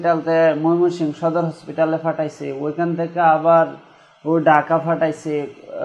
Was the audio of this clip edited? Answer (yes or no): no